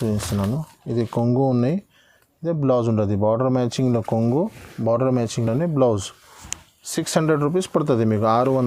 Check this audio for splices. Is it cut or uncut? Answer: uncut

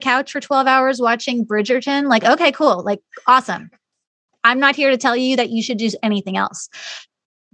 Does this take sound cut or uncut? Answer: uncut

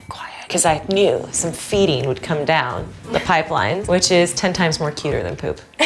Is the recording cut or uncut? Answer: cut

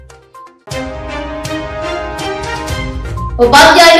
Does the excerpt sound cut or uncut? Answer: uncut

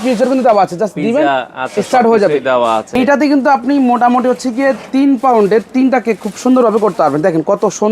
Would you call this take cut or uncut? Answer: cut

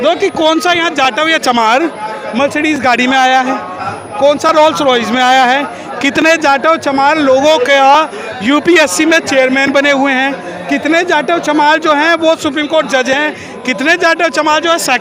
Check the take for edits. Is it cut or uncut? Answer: uncut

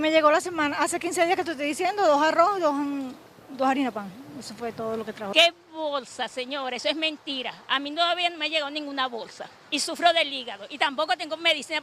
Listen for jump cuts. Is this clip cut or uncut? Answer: cut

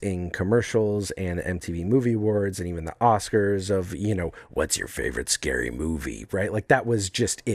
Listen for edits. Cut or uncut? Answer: uncut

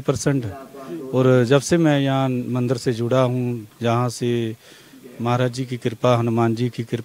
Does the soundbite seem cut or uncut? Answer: uncut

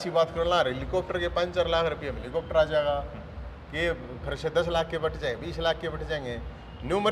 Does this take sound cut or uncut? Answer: uncut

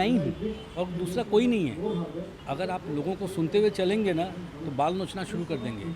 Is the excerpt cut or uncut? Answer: cut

